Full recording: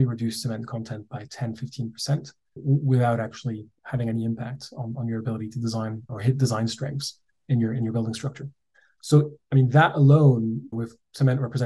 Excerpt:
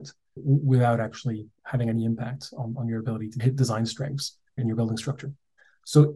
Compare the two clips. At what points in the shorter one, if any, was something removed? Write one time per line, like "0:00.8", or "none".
0:03.4
0:04.6